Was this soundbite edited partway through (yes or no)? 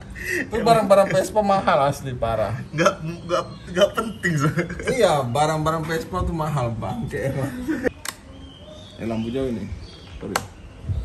yes